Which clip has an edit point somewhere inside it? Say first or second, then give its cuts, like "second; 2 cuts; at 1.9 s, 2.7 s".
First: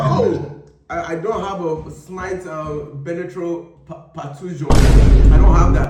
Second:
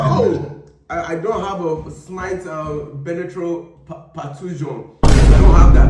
second; 1 cut; at 4.7 s